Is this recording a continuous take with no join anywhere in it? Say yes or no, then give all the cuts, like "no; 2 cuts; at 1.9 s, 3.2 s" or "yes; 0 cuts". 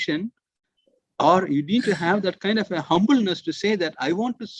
yes; 0 cuts